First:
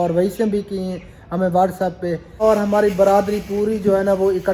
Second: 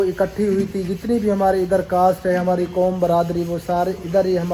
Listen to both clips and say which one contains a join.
first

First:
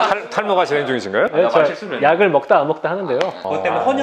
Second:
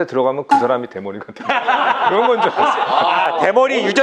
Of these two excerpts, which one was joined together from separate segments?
first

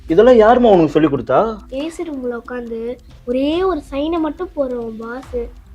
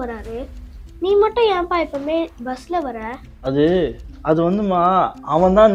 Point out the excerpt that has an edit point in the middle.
first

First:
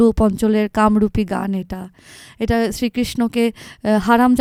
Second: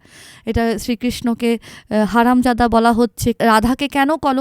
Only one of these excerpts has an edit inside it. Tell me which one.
second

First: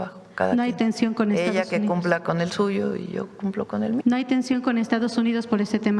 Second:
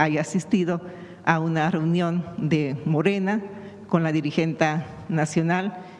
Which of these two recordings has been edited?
first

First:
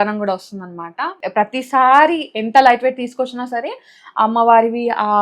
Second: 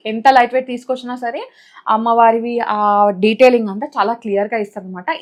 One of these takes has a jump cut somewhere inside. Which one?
first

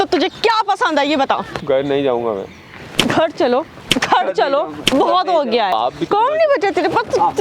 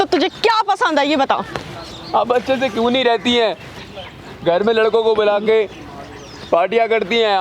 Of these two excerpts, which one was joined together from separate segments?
first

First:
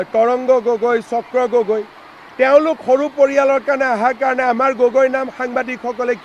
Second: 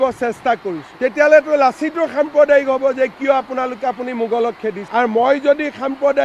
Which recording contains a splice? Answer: second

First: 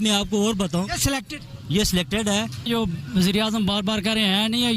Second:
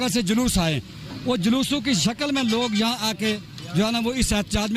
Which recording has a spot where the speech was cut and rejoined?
first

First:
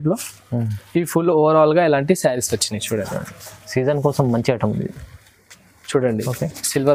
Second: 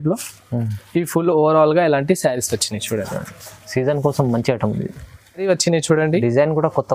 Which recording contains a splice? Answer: second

